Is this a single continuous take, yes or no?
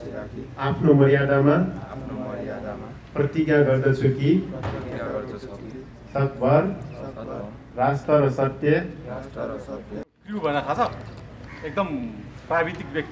no